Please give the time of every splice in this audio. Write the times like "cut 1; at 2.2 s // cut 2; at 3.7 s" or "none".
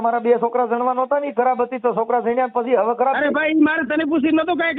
none